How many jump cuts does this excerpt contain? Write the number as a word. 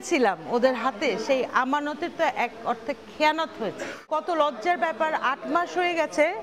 one